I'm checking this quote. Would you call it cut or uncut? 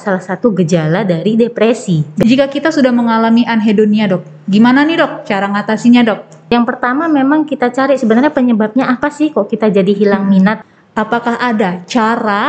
cut